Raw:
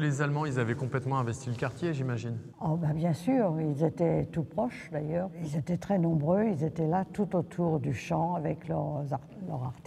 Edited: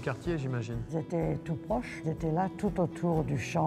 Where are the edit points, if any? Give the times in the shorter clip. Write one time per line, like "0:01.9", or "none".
0:00.9
0:02.0